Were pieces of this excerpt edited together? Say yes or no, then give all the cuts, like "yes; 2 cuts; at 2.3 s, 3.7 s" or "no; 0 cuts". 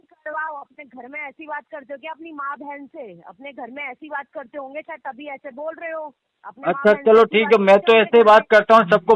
no; 0 cuts